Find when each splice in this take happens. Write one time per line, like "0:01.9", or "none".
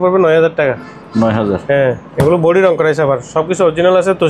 none